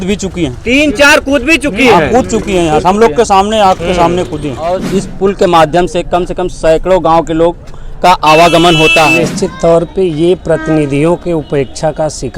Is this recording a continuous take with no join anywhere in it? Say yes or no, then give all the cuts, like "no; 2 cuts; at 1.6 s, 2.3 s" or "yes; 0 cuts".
no; 2 cuts; at 4.8 s, 9.2 s